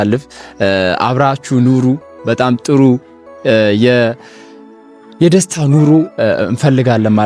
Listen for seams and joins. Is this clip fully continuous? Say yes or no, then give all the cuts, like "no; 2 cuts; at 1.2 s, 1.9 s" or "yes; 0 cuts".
yes; 0 cuts